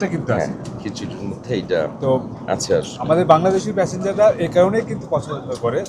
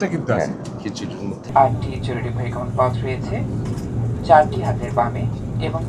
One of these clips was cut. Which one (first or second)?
second